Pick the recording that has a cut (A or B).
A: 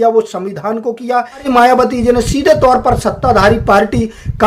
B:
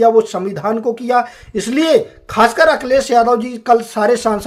A